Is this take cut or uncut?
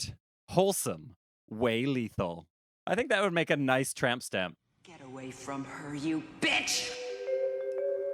cut